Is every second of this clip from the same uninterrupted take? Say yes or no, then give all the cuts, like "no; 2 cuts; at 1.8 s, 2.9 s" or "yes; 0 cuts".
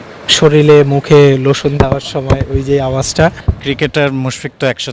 no; 1 cut; at 3.5 s